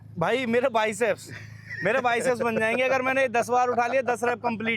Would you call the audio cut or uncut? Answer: uncut